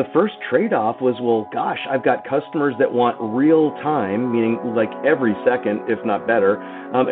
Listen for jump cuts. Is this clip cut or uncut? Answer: uncut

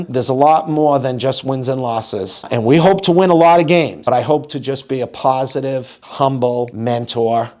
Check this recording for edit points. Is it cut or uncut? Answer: uncut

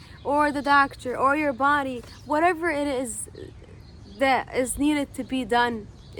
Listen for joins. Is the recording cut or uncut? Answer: uncut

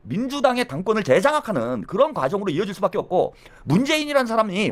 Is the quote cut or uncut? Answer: uncut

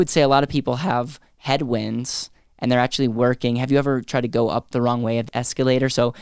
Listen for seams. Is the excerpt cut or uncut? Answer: cut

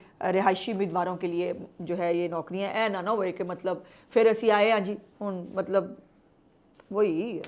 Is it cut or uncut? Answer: uncut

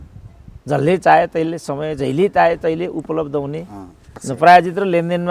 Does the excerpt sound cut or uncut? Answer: cut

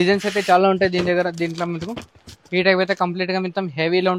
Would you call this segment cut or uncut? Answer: uncut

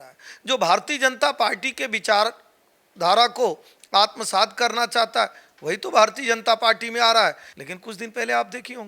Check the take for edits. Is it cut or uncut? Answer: cut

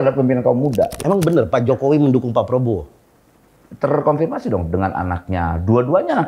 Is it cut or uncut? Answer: cut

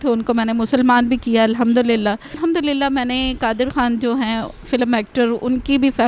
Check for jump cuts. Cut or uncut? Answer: cut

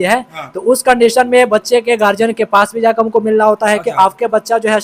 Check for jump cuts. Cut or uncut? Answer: uncut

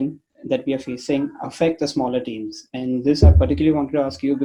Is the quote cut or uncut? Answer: uncut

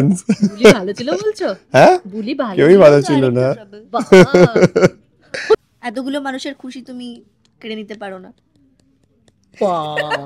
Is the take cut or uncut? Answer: cut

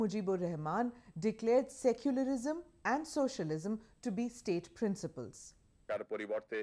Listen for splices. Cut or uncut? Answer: uncut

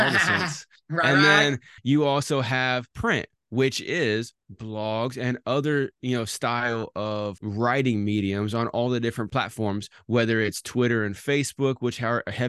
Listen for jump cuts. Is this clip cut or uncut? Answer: cut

